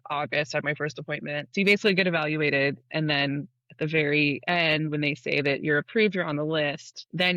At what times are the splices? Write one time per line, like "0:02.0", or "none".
0:01.5

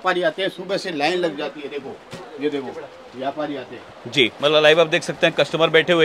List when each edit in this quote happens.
none

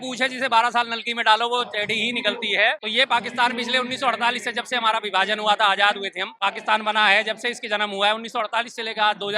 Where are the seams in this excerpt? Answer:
0:02.8
0:06.3

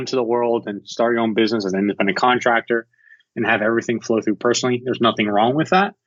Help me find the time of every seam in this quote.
none

